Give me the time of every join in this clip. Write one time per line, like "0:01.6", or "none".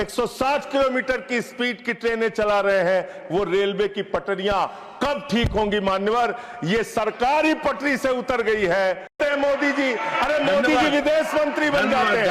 0:09.2